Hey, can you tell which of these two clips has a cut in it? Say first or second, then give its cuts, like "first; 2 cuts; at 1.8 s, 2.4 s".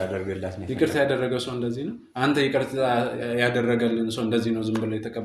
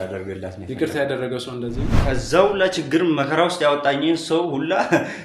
second; 1 cut; at 1.9 s